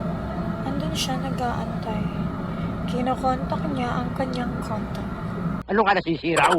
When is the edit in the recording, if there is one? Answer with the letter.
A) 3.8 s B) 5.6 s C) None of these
B